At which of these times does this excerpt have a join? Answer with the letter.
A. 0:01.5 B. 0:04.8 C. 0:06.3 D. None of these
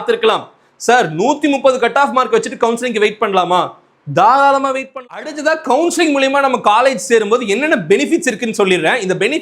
B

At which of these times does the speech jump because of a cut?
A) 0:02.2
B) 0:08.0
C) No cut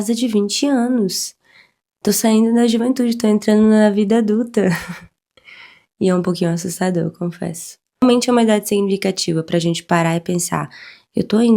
B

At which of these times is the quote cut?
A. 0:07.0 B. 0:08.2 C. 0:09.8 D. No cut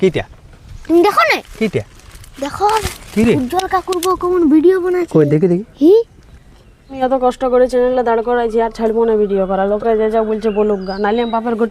A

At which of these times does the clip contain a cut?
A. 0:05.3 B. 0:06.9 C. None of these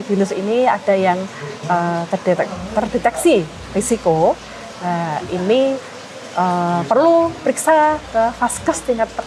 C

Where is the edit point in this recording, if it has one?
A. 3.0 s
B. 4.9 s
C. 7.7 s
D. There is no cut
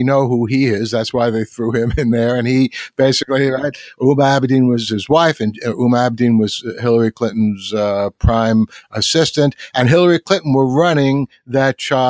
B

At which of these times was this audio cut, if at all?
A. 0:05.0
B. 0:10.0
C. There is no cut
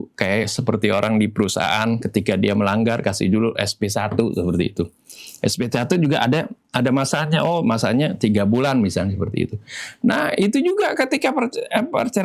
C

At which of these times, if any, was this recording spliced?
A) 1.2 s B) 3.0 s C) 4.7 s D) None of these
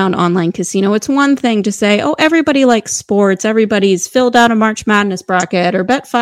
D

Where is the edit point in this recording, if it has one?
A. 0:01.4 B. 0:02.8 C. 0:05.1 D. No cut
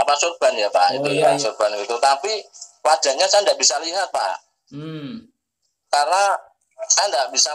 A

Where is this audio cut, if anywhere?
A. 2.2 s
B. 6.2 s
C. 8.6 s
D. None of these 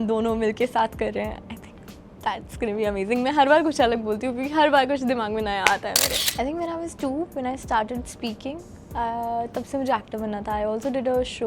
B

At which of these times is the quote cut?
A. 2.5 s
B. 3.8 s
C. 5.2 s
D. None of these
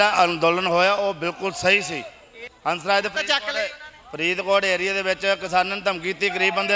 A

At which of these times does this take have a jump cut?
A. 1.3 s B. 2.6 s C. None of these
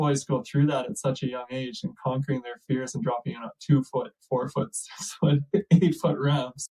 C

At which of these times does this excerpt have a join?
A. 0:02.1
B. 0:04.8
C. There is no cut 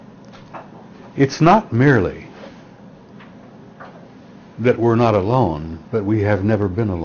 C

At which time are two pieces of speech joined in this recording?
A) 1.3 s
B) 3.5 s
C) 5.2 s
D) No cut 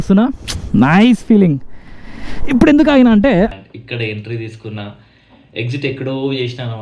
B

